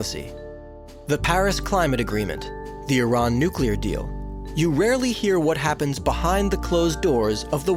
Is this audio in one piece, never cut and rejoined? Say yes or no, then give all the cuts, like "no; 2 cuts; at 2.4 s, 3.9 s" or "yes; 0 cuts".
yes; 0 cuts